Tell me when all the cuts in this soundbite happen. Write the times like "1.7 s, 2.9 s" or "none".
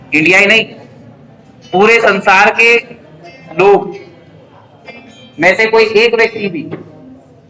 none